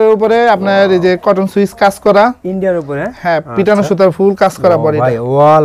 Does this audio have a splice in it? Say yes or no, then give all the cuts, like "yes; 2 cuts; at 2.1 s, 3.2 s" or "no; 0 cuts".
no; 0 cuts